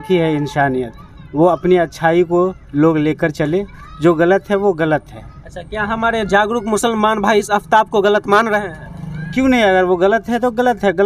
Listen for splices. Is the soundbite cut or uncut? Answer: uncut